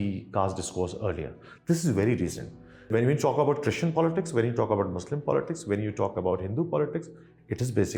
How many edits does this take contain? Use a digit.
1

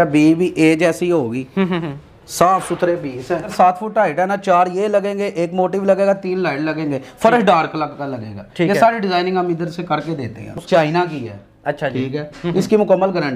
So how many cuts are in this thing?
2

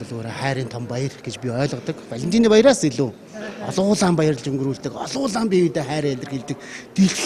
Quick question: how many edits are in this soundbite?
1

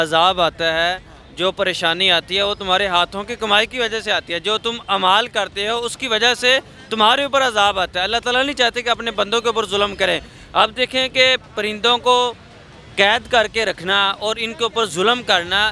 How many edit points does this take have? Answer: 0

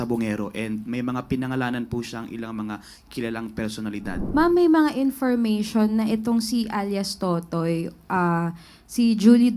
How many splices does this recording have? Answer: 1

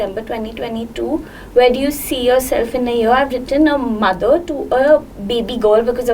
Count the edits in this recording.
0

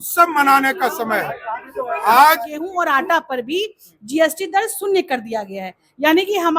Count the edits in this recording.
1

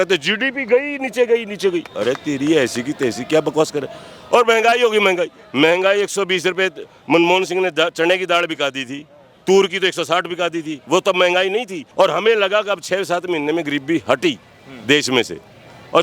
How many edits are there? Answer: 1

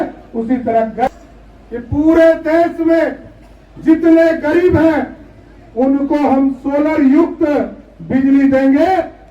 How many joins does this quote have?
1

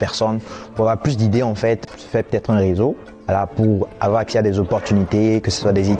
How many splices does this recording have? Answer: 1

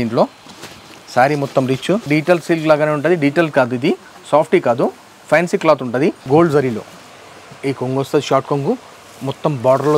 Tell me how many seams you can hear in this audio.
2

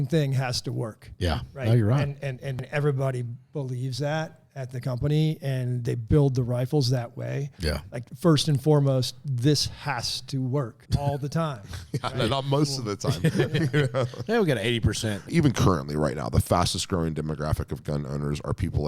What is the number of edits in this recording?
3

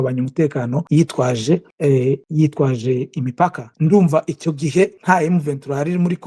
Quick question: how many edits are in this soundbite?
4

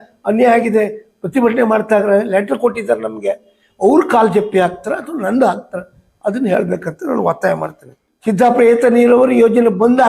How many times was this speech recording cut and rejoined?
1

